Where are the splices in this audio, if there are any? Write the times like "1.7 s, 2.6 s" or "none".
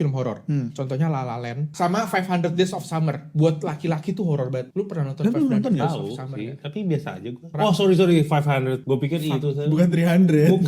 1.7 s, 4.7 s, 7.5 s, 8.8 s